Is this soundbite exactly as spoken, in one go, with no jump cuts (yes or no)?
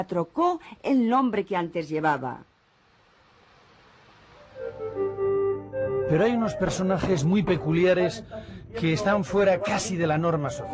no